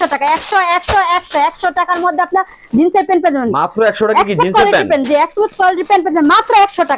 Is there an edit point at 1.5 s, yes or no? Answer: no